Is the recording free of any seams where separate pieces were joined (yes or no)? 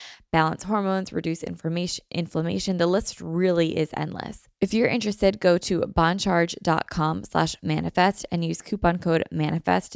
no